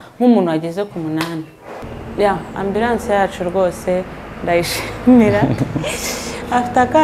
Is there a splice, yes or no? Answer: yes